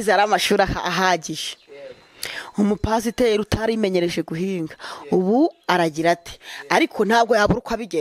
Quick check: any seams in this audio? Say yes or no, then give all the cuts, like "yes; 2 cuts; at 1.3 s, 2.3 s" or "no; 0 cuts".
no; 0 cuts